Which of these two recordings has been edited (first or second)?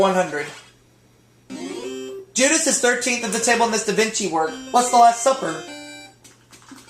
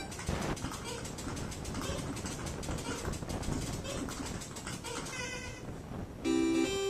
first